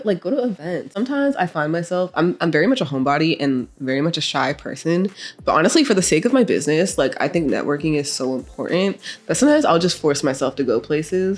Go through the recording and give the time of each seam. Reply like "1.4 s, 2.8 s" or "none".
0.9 s